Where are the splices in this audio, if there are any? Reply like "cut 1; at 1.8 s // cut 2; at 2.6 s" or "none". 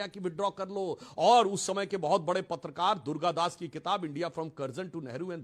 none